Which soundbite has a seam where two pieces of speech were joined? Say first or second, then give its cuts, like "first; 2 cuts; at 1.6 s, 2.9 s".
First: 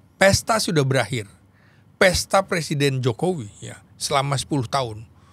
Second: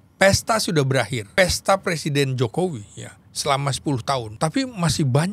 second; 2 cuts; at 1.4 s, 4.3 s